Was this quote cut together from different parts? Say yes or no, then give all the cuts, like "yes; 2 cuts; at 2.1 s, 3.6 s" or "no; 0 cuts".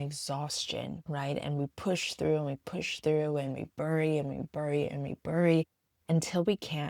yes; 1 cut; at 1.0 s